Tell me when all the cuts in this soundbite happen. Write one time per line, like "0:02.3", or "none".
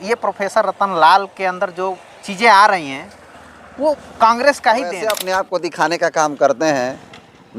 0:05.2